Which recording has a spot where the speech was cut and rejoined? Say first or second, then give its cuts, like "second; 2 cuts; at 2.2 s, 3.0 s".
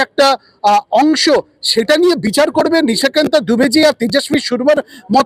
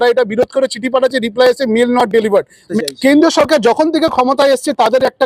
second; 1 cut; at 2.7 s